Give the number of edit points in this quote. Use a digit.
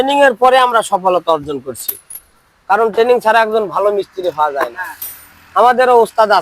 0